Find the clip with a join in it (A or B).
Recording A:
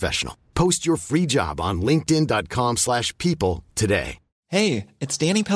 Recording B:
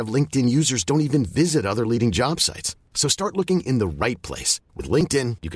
A